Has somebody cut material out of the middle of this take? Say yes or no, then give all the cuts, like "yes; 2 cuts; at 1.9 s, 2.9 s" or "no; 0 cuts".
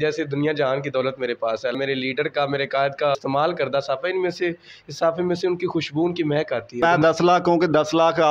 yes; 3 cuts; at 1.8 s, 3.1 s, 6.8 s